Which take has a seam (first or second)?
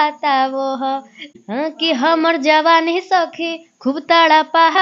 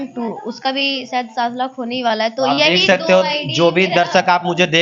first